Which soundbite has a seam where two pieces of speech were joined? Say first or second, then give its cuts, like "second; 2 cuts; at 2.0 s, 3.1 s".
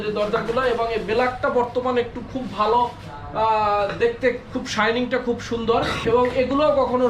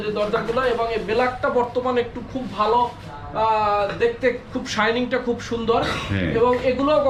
first; 1 cut; at 6.0 s